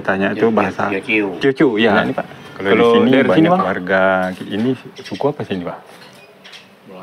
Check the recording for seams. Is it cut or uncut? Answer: cut